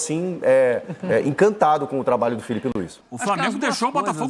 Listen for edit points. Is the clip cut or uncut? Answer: cut